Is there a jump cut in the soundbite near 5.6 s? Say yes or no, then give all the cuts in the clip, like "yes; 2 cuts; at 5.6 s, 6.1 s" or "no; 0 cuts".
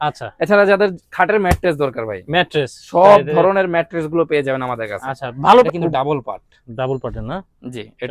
yes; 1 cut; at 5.6 s